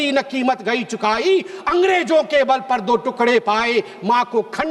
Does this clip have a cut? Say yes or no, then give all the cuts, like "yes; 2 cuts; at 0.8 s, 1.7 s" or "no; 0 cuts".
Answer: no; 0 cuts